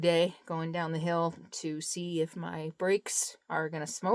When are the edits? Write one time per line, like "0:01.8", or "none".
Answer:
none